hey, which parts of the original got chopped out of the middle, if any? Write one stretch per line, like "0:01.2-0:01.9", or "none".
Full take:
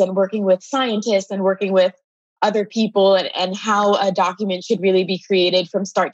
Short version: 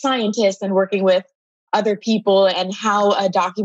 0:03.3-0:03.4

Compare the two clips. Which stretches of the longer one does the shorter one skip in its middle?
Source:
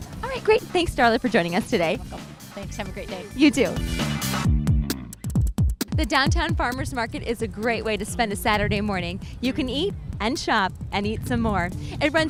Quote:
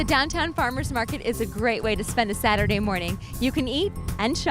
none

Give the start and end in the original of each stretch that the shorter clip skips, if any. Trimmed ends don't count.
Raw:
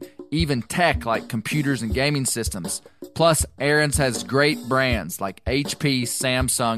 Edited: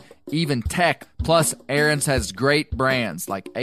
0:01.0-0:02.9

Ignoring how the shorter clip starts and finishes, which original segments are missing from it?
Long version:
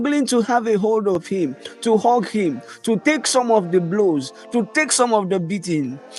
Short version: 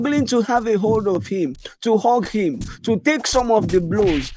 none

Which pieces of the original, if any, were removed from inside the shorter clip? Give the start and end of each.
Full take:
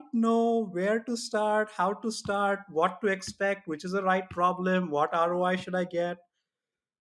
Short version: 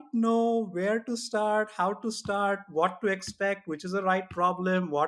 none

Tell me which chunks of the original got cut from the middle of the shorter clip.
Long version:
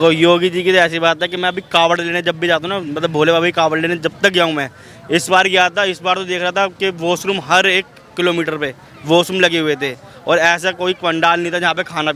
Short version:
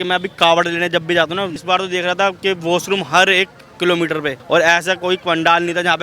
0:02.9-0:06.0
0:08.7-0:10.1

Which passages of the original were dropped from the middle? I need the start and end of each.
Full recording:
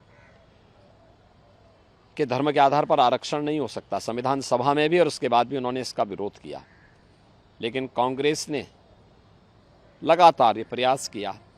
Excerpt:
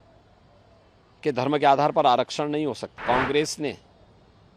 0:03.9-0:07.9

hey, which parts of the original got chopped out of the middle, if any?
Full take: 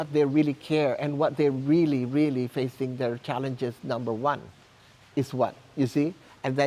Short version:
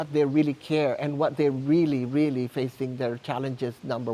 none

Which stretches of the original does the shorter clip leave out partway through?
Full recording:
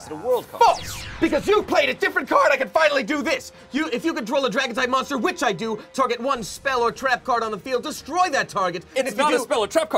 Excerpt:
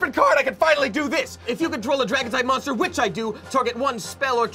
0:03.6-0:03.9

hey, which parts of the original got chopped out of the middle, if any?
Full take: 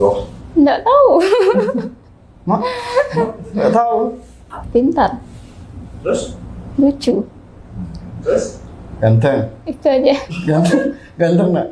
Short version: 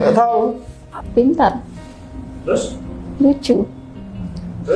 none

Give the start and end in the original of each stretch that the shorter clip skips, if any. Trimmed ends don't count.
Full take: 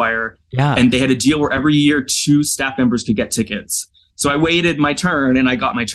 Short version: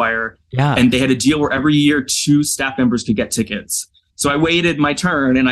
none

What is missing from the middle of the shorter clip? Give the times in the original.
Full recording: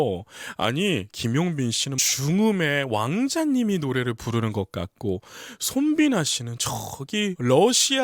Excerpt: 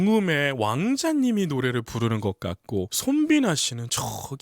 0:05.3-0:05.6

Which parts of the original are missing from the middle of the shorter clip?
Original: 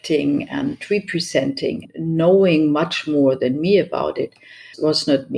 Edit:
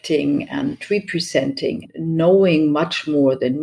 none

